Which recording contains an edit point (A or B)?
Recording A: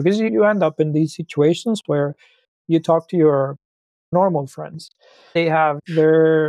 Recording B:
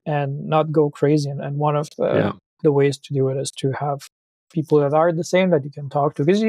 A